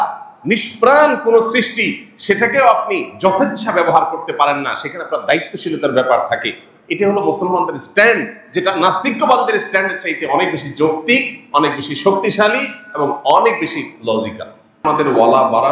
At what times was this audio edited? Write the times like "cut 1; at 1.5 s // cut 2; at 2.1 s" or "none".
cut 1; at 14.8 s